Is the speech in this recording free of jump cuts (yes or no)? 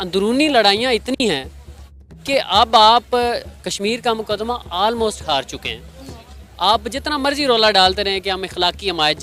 yes